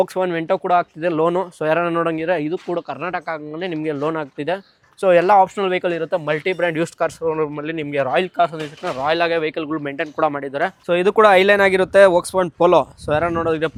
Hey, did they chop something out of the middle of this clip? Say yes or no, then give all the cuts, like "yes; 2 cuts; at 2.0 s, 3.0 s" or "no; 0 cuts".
no; 0 cuts